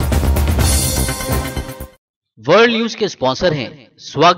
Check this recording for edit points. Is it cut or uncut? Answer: cut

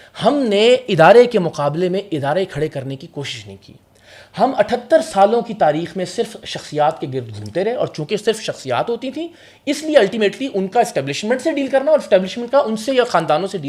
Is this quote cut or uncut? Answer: uncut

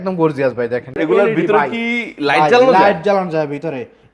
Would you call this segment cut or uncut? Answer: cut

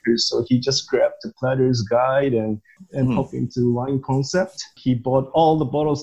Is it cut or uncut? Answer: uncut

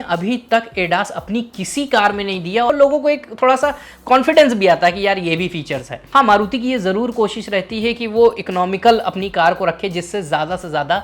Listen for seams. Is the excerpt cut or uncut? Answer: cut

